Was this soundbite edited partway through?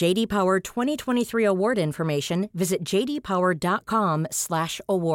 no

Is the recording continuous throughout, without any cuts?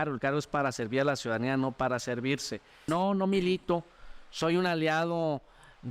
no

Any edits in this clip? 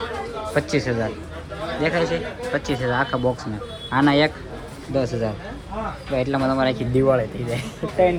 no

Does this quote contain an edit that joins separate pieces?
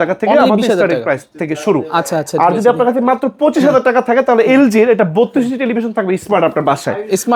no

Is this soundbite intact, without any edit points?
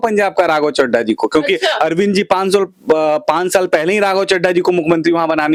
yes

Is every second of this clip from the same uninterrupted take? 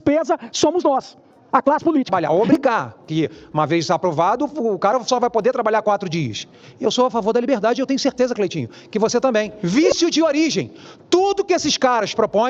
no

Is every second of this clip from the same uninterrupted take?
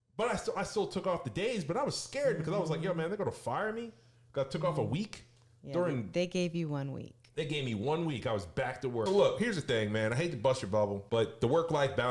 no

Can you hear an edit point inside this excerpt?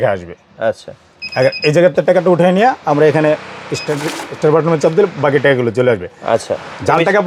no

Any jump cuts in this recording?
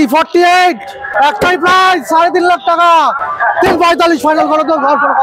yes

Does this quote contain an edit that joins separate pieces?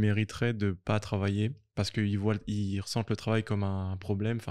no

